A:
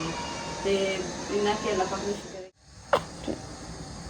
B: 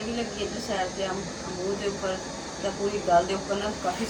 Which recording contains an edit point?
A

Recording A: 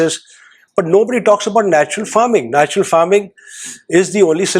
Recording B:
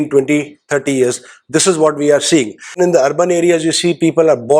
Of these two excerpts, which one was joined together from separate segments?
B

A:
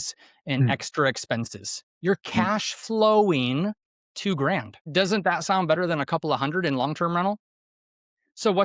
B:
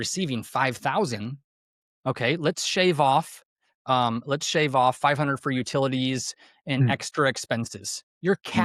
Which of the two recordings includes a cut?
A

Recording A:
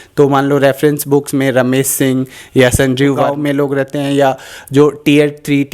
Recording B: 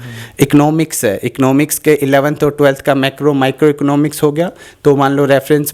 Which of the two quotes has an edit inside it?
A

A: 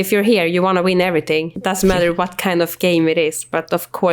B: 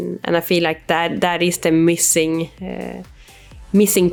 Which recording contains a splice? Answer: A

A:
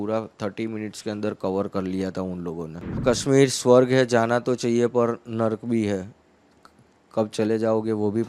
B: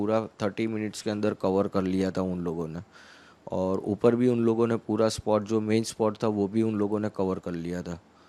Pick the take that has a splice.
A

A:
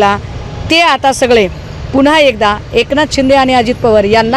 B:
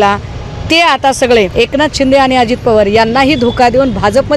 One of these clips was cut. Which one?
B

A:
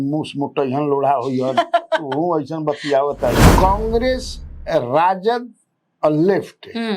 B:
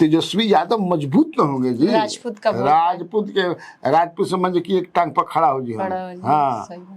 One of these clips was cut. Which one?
A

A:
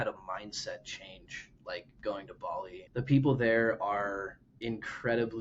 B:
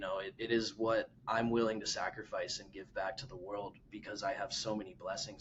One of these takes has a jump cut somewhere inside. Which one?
A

